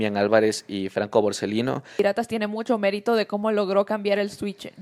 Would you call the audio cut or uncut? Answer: cut